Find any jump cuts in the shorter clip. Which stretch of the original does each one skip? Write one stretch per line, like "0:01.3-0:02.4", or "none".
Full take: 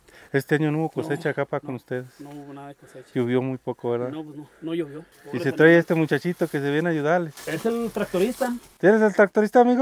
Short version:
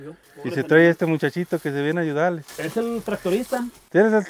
none

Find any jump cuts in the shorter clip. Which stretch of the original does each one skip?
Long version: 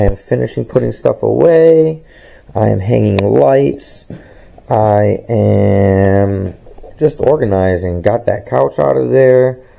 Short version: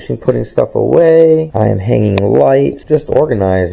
0:02.0-0:02.5
0:03.8-0:06.9

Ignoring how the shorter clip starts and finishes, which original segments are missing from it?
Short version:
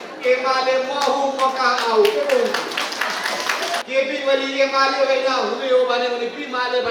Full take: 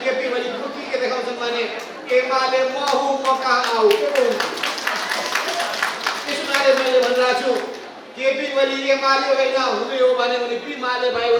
0:05.7-0:08.1

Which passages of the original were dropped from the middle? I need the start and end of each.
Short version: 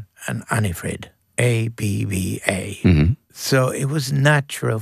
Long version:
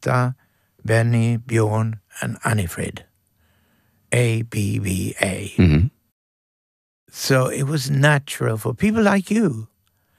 0:03.1-0:03.9
0:06.0-0:07.1

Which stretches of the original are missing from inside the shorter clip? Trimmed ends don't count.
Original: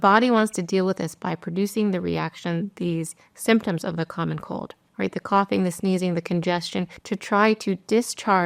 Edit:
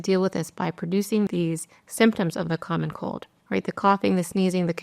0:01.9-0:02.8

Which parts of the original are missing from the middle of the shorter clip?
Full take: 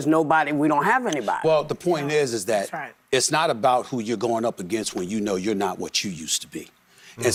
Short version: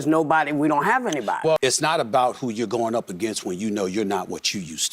0:01.6-0:03.1

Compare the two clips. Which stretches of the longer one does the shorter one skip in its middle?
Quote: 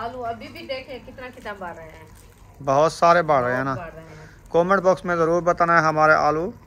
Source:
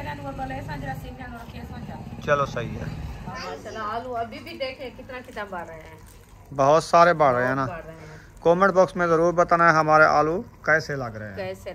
none

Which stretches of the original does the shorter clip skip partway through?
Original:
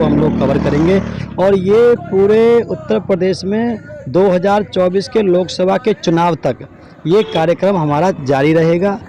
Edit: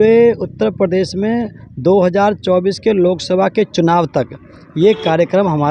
none

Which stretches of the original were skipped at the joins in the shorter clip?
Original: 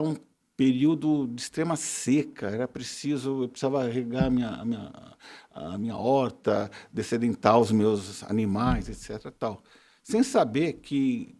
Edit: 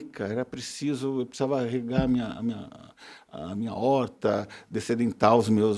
none

